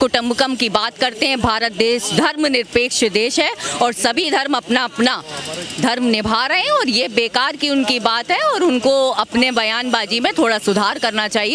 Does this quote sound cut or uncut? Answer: uncut